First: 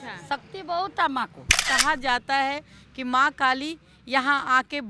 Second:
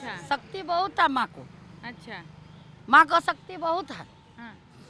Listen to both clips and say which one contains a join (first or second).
first